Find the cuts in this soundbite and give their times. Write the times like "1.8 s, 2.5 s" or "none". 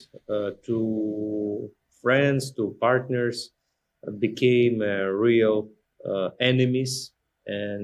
none